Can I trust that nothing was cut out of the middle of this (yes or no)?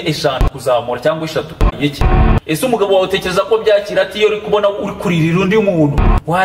no